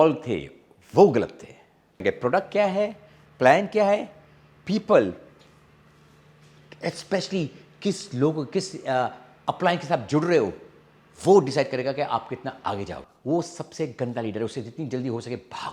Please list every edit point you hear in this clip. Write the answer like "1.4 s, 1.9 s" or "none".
2.0 s, 13.1 s